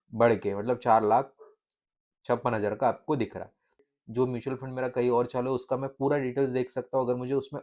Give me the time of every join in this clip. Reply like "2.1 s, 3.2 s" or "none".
3.8 s